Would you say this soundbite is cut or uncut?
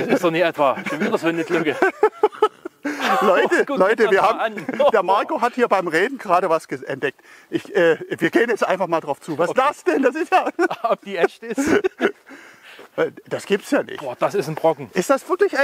uncut